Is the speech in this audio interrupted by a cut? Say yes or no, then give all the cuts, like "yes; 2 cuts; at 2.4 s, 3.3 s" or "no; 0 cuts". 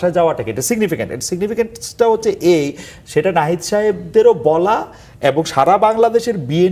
no; 0 cuts